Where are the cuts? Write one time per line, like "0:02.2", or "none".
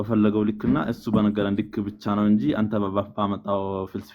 none